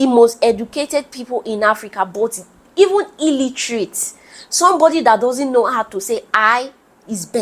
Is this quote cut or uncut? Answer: uncut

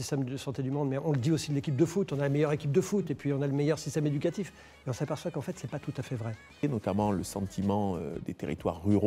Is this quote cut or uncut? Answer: cut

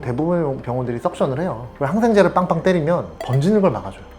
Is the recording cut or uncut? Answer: cut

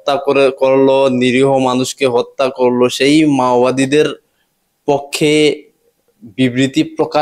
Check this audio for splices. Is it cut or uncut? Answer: uncut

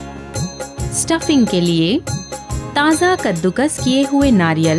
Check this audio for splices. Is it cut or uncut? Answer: cut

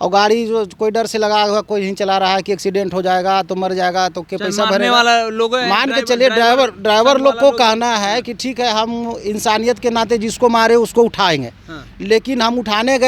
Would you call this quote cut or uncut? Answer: uncut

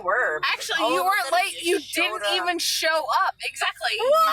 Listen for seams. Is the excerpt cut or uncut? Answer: uncut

